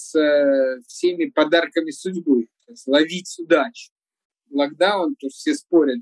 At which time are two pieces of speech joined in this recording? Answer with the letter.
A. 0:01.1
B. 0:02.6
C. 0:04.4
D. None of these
C